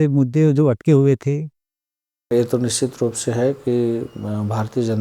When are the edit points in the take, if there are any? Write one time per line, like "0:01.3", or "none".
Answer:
0:02.3